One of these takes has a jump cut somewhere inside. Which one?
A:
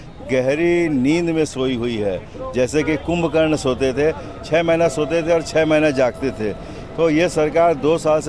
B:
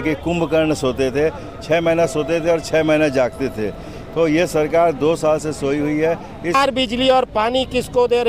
B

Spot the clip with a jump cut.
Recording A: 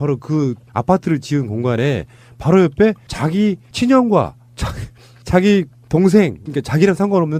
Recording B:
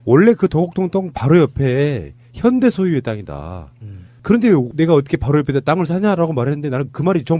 B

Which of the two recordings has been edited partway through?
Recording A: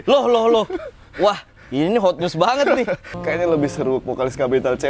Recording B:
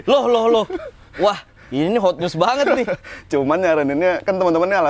A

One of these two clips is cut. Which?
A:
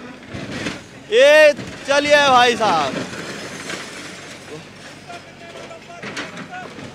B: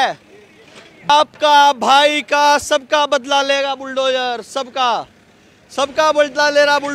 B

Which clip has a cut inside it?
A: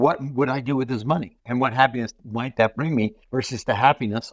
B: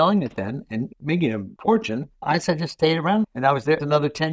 A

